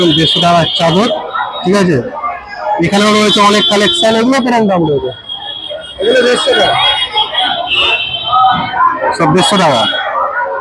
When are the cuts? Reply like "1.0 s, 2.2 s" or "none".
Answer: none